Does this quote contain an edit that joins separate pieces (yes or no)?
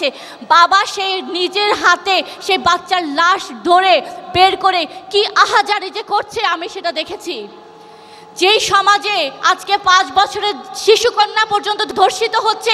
no